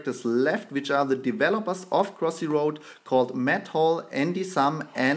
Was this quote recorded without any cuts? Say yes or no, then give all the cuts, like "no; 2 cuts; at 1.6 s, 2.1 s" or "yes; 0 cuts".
no; 1 cut; at 2.6 s